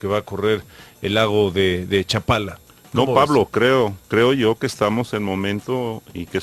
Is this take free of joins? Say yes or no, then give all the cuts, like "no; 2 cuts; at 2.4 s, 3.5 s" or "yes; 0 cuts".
yes; 0 cuts